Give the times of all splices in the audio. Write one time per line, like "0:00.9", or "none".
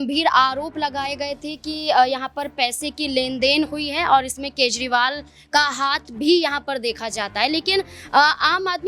none